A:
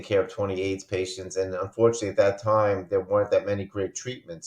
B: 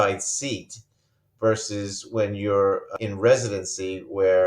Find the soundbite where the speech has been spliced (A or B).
B